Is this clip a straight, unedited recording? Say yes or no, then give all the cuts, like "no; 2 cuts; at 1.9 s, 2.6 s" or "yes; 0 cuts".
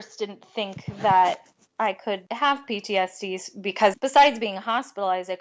no; 2 cuts; at 2.3 s, 3.9 s